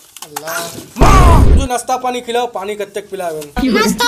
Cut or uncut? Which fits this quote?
cut